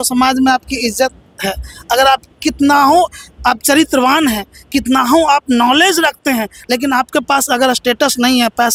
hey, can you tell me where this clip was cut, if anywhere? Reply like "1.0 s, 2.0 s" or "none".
none